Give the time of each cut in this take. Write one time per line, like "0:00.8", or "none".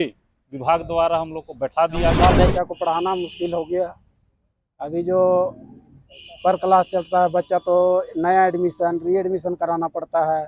0:02.2